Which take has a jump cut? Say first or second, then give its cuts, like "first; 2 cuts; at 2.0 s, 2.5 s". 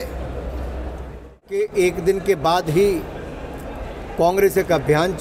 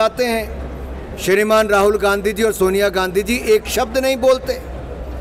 first; 1 cut; at 1.6 s